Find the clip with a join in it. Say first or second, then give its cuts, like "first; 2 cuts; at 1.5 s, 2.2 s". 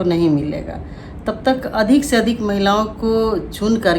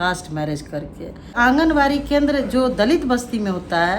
second; 1 cut; at 1.4 s